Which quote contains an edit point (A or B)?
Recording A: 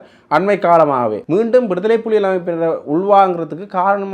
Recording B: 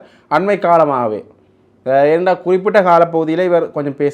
A